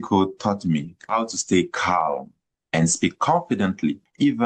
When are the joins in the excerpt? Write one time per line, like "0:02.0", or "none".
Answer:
none